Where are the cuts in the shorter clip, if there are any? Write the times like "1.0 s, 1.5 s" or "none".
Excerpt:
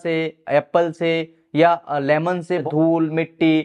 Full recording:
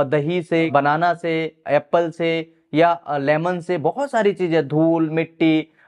2.7 s